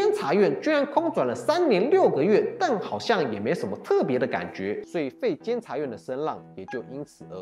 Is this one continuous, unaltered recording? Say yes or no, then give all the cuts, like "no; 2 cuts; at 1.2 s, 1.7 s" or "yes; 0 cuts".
yes; 0 cuts